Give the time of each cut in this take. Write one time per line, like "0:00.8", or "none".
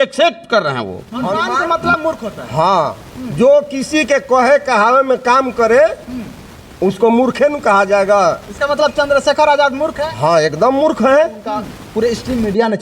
0:01.2
0:11.8

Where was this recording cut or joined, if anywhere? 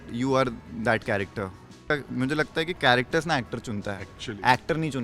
0:01.8

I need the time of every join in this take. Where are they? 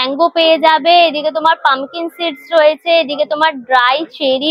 none

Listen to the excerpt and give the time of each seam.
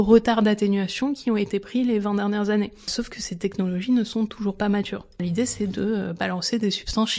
0:02.9
0:05.2

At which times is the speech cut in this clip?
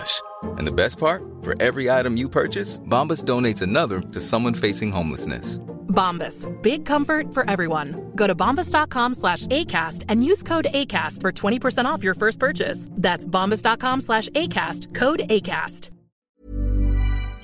0:16.2

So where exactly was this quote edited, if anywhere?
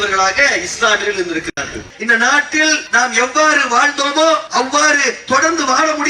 0:01.9
0:02.8
0:04.5

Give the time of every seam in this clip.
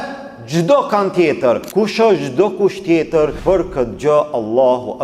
0:01.7
0:03.4

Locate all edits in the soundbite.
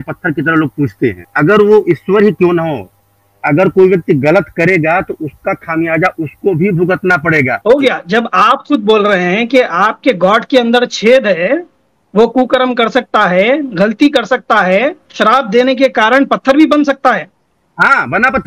0:01.3
0:07.6

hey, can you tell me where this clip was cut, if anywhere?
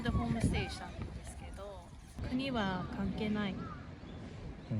0:02.2

